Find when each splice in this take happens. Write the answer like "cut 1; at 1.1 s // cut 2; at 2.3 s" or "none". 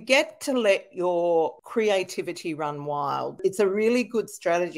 cut 1; at 1.6 s // cut 2; at 3.4 s

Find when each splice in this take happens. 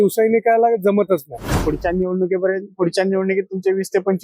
cut 1; at 1.5 s

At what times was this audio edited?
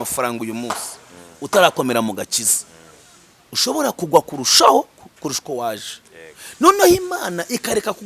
none

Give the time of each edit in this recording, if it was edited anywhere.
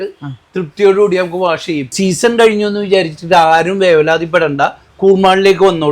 cut 1; at 1.9 s

